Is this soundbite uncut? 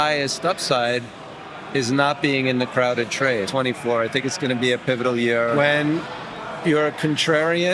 no; 2 cuts; at 3.5 s, 5.5 s

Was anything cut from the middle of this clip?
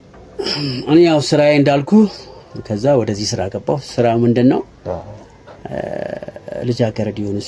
no; 0 cuts

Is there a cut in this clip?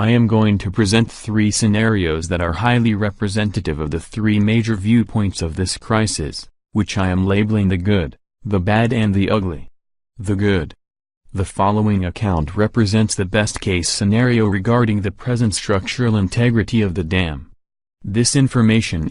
yes; 1 cut; at 3.1 s

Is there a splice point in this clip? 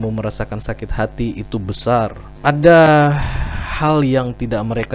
yes; 1 cut; at 2.3 s

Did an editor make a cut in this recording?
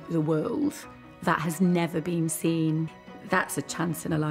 yes; 1 cut; at 3.0 s

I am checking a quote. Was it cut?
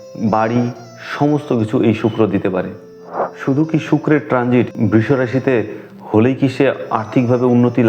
yes; 1 cut; at 3.2 s

